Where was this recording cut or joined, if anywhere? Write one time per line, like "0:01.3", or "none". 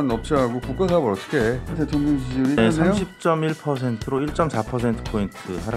0:01.7